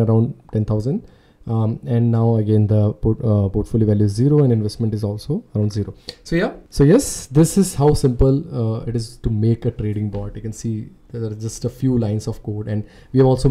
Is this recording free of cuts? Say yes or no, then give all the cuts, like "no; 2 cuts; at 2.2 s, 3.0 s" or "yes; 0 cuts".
yes; 0 cuts